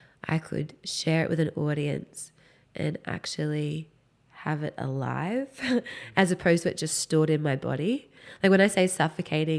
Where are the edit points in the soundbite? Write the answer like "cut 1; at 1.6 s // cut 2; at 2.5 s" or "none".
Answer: none

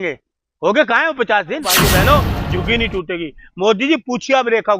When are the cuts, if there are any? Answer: cut 1; at 1.8 s

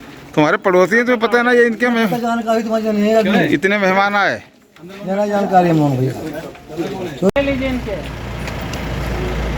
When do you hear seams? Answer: none

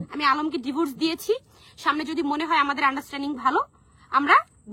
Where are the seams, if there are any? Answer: none

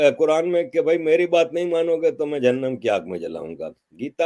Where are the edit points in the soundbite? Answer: none

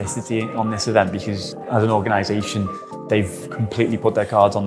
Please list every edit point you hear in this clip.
cut 1; at 1.6 s

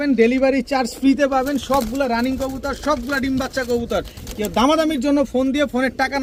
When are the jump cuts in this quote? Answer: none

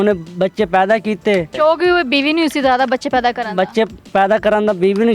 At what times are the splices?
cut 1; at 1.5 s

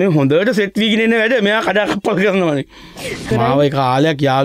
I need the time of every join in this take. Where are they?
cut 1; at 3.3 s

